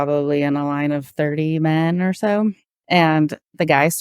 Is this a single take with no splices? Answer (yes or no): no